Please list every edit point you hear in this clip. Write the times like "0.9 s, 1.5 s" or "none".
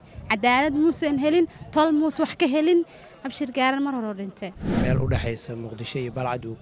4.6 s